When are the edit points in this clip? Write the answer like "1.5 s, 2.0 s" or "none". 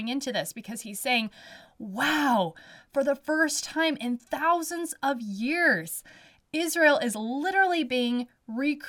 none